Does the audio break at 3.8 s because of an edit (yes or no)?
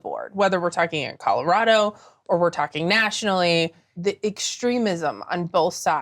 yes